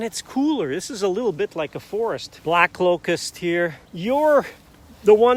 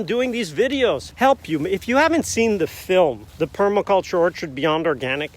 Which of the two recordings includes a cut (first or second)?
second